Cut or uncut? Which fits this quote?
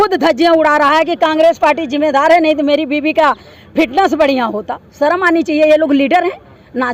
uncut